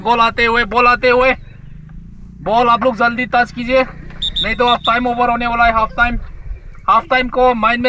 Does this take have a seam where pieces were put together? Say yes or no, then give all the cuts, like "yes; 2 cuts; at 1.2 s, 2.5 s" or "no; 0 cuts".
no; 0 cuts